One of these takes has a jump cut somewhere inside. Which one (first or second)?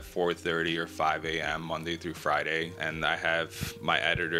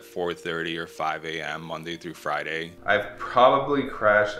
second